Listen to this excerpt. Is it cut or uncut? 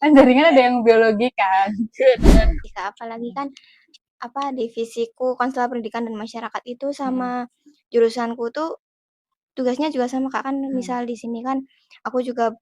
cut